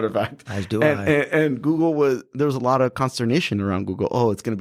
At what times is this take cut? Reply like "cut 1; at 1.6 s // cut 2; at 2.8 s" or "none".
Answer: none